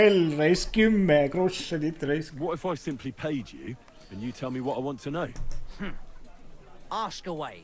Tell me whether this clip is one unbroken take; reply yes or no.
yes